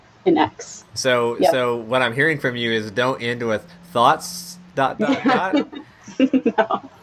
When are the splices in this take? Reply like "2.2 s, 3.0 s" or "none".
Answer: none